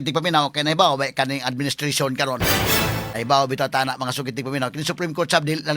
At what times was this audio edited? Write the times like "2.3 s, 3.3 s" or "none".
3.1 s